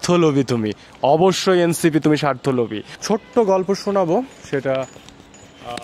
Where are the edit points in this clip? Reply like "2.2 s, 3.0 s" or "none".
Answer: 3.0 s